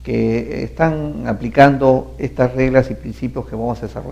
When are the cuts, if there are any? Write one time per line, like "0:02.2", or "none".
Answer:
0:03.1